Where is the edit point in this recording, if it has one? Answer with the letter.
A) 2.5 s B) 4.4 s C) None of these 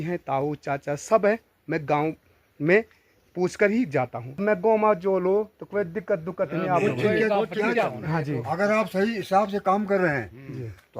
B